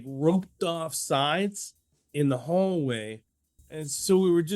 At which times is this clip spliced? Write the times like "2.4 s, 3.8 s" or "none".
3.6 s